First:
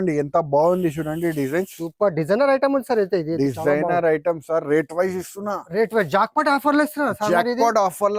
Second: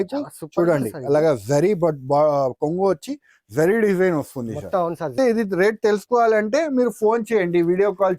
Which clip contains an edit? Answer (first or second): second